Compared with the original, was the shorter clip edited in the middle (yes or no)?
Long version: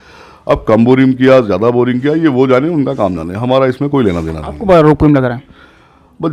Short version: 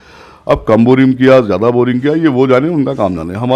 no